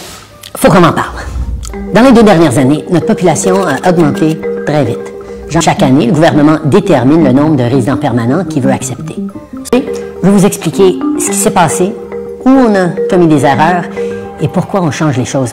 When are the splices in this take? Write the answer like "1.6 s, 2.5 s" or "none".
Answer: 5.6 s, 9.7 s

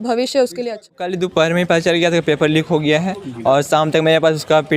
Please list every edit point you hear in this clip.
1.0 s

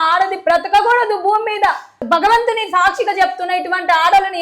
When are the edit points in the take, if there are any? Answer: 2.0 s

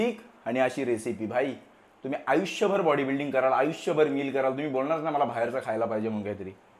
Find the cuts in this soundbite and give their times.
none

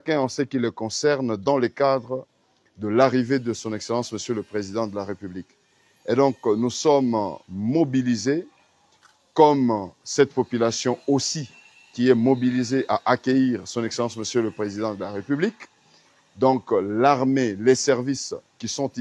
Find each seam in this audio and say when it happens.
none

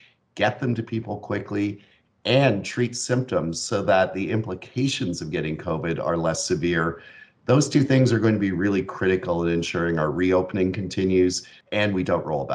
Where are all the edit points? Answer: 11.5 s

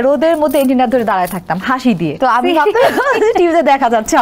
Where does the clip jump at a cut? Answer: 2.2 s

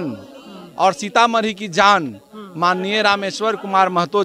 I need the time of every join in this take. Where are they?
none

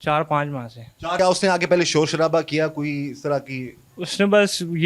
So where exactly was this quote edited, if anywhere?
1.2 s

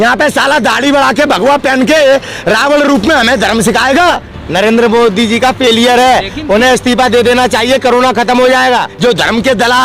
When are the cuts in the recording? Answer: 4.3 s, 8.9 s

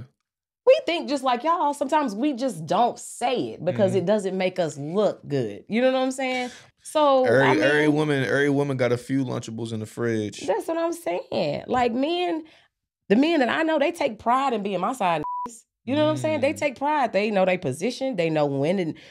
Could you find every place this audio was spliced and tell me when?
6.6 s

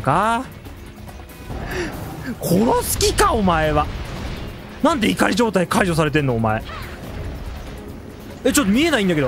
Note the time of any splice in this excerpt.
1.4 s

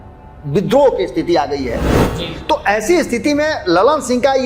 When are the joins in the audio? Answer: 1.9 s

